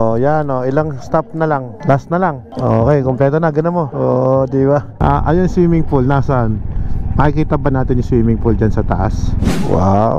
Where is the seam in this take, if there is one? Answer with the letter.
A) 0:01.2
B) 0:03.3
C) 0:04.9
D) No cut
C